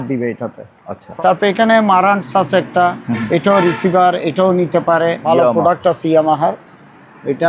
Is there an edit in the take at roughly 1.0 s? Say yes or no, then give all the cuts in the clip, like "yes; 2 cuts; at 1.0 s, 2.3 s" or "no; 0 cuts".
yes; 2 cuts; at 1.0 s, 5.2 s